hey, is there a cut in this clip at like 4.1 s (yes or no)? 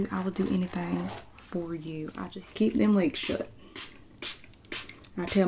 no